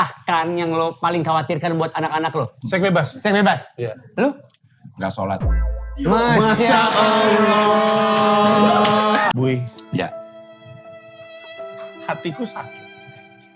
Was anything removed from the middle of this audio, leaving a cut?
yes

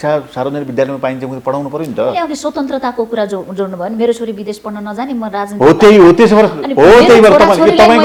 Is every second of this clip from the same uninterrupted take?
yes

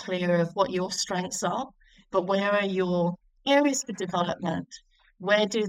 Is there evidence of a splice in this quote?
yes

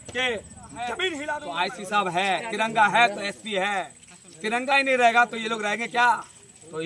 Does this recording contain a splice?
yes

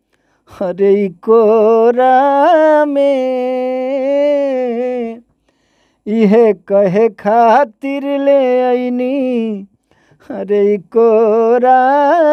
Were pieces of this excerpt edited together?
no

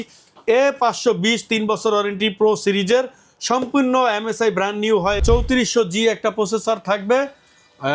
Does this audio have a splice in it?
yes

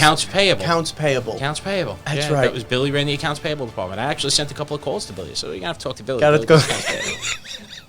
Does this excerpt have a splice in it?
no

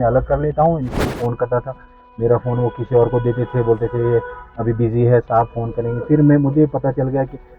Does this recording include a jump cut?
yes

